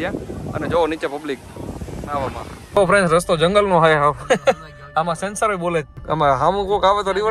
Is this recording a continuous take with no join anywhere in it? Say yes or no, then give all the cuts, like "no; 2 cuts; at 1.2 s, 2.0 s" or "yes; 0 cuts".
no; 2 cuts; at 2.7 s, 6.0 s